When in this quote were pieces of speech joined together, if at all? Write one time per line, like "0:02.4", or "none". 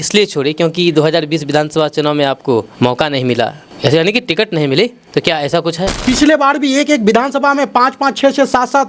0:02.7
0:03.6
0:05.0
0:06.0